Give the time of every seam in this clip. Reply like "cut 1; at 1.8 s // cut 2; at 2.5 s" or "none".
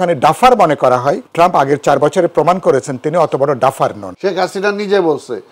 cut 1; at 1.2 s // cut 2; at 4.0 s